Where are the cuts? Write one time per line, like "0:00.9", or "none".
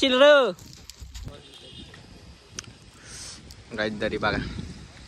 0:01.3

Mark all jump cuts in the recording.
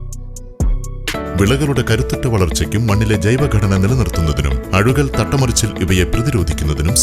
0:01.1

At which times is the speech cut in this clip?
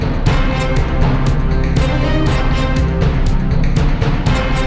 none

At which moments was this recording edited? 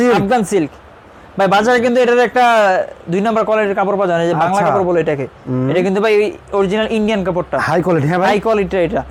none

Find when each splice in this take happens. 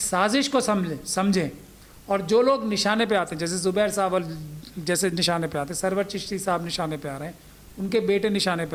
none

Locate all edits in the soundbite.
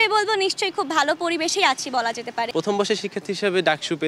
0:02.5

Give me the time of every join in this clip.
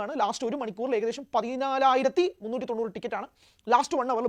none

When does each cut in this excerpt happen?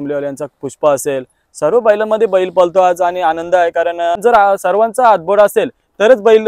0:04.2

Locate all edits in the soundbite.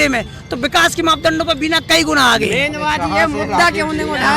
none

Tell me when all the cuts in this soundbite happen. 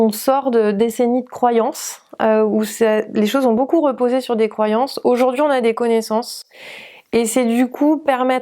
none

